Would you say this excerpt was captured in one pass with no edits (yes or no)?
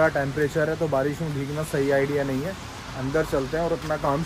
yes